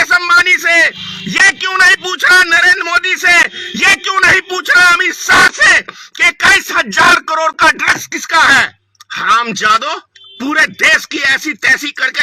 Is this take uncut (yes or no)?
no